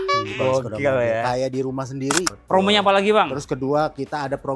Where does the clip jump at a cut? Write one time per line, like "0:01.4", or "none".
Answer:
0:02.3